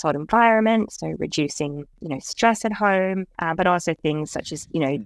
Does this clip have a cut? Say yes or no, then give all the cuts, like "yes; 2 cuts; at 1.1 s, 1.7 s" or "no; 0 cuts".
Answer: yes; 2 cuts; at 1.9 s, 3.3 s